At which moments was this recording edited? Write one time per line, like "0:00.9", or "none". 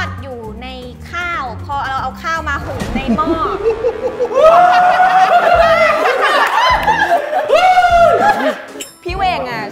0:08.8